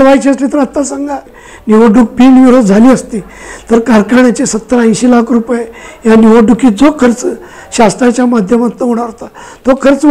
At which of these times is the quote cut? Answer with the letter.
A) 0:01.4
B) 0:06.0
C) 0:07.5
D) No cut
A